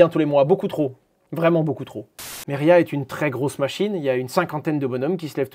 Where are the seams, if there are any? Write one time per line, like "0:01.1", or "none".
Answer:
0:02.4